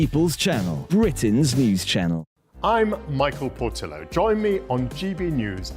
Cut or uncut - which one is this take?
cut